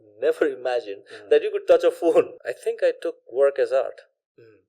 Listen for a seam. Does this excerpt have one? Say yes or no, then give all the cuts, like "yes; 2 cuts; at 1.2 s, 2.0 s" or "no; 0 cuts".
yes; 1 cut; at 2.4 s